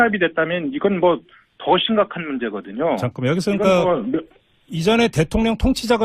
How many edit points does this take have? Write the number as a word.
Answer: one